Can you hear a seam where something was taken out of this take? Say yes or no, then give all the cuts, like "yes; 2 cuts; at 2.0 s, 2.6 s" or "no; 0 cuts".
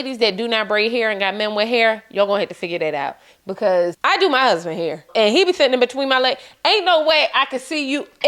yes; 2 cuts; at 4.0 s, 5.1 s